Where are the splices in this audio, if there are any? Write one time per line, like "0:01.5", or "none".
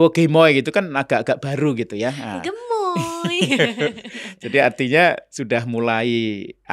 none